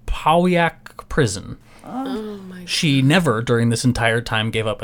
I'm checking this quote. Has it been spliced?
yes; 1 cut; at 1.5 s

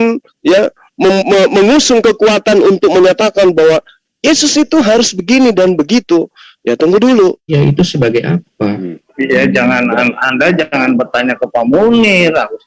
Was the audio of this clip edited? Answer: yes; 1 cut; at 7.4 s

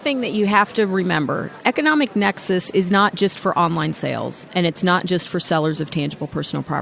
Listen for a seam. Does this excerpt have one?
yes; 1 cut; at 1.5 s

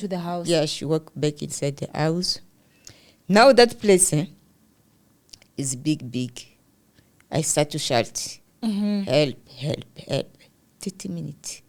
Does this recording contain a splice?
no; 0 cuts

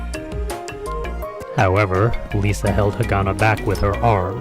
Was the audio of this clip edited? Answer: yes; 1 cut; at 2.6 s

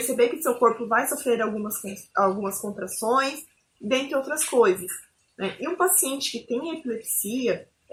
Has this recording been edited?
no; 0 cuts

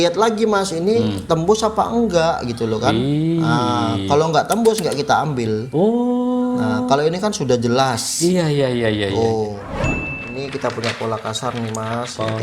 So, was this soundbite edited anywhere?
yes; 1 cut; at 10.1 s

